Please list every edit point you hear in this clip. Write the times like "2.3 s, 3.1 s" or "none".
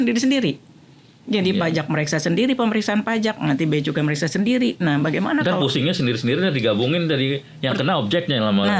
none

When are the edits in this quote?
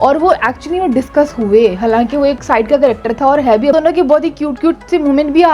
3.7 s

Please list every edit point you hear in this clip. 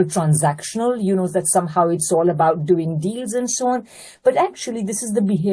none

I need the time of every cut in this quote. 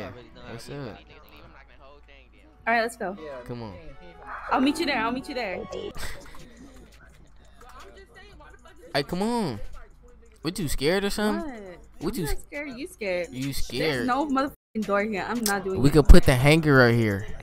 5.9 s

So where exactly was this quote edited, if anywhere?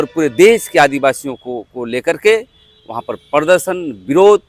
none

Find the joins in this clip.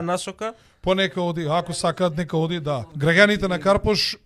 2.9 s

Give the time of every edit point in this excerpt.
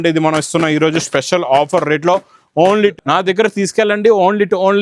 2.9 s

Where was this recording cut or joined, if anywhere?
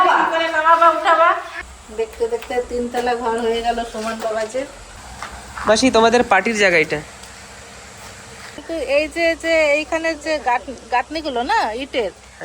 1.5 s, 8.6 s

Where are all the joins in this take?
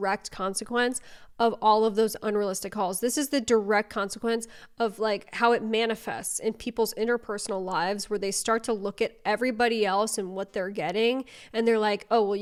none

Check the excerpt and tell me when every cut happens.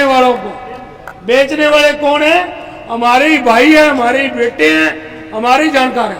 none

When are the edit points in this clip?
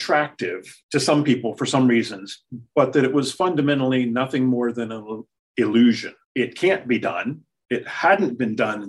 none

